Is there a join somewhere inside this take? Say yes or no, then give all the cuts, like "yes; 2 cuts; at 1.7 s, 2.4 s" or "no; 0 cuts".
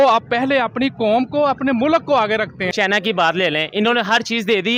yes; 1 cut; at 2.7 s